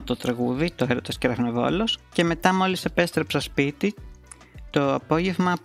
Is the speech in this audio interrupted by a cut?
no; 0 cuts

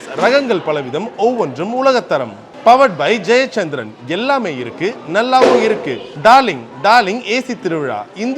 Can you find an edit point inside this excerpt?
no; 0 cuts

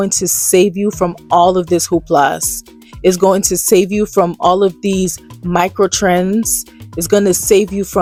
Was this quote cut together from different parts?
no; 0 cuts

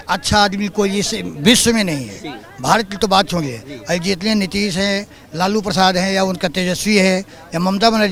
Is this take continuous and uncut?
yes; 0 cuts

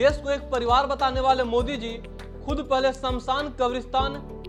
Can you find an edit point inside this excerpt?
no; 0 cuts

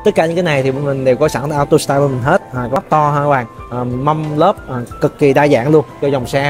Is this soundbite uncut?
no; 1 cut; at 2.8 s

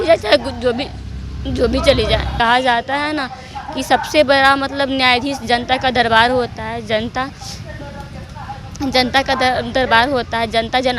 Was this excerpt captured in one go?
no; 1 cut; at 2.3 s

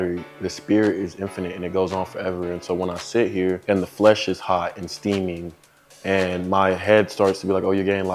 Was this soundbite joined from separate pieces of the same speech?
no; 0 cuts

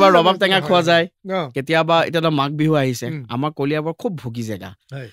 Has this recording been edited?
no; 0 cuts

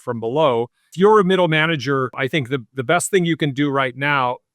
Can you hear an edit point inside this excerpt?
yes; 2 cuts; at 0.9 s, 2.2 s

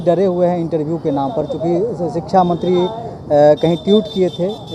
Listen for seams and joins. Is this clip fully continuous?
yes; 0 cuts

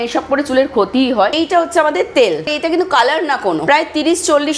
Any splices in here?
yes; 3 cuts; at 1.3 s, 2.5 s, 3.6 s

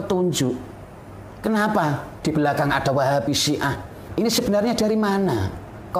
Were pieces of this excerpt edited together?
yes; 1 cut; at 2.1 s

